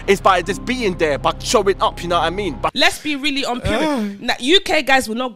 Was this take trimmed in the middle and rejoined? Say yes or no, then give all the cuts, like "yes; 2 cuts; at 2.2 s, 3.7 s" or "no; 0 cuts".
yes; 1 cut; at 2.7 s